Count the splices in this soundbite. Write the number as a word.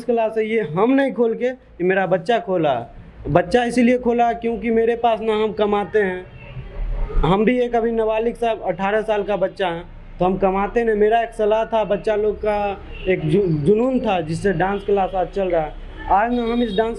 zero